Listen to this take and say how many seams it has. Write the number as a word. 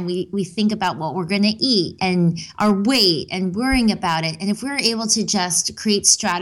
one